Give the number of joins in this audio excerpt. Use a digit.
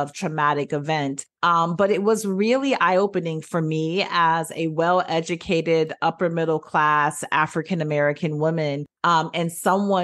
0